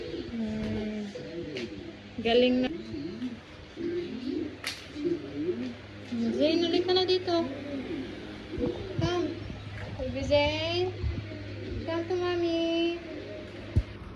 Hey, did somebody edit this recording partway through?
yes; 1 cut; at 2.7 s

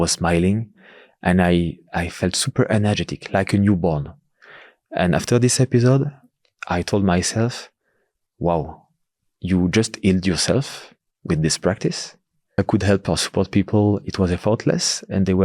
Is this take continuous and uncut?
no; 1 cut; at 12.6 s

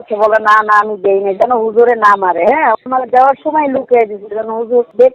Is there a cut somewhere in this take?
no; 0 cuts

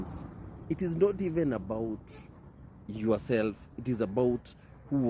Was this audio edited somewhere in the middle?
no; 0 cuts

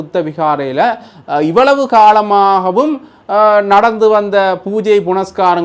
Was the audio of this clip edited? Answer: no; 0 cuts

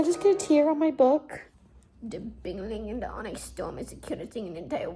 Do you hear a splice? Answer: yes; 1 cut; at 1.4 s

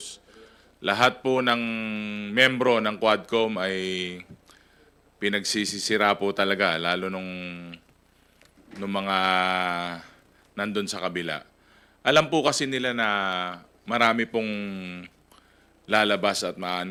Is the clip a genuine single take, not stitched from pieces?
yes; 0 cuts

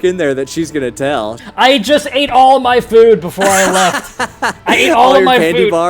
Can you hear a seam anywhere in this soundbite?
yes; 1 cut; at 1.4 s

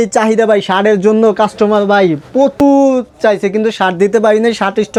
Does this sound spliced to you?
no; 0 cuts

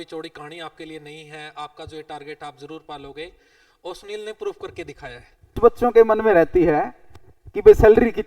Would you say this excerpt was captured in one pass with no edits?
no; 1 cut; at 5.6 s

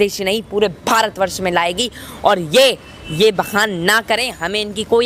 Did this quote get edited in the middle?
no; 0 cuts

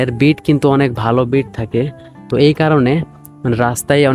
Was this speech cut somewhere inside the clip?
no; 0 cuts

